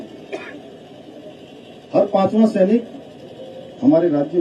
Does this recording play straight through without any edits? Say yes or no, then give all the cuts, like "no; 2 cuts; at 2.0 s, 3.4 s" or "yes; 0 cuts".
yes; 0 cuts